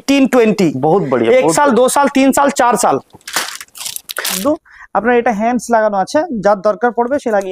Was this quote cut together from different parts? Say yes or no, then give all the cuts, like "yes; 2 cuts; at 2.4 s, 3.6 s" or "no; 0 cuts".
yes; 1 cut; at 4.4 s